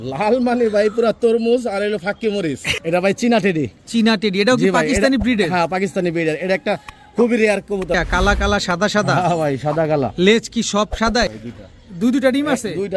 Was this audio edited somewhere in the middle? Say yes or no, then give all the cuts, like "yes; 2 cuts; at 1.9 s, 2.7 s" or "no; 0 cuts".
yes; 3 cuts; at 2.7 s, 7.9 s, 11.3 s